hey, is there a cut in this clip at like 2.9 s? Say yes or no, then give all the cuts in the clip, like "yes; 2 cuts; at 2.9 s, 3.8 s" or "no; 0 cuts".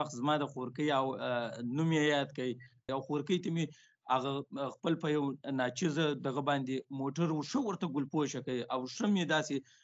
yes; 1 cut; at 2.9 s